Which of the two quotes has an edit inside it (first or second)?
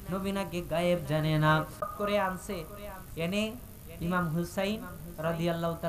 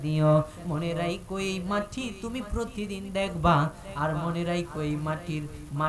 first